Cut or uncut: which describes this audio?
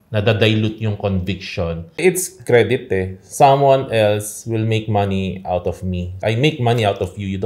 cut